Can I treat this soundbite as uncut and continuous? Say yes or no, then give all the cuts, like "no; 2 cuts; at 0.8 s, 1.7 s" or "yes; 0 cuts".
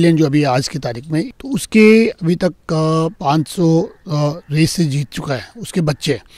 no; 2 cuts; at 1.3 s, 3.2 s